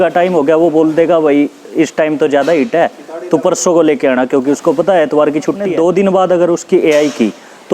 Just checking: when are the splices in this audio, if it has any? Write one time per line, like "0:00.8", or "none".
0:05.6